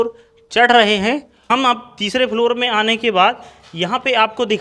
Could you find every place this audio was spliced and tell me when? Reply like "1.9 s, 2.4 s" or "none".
1.5 s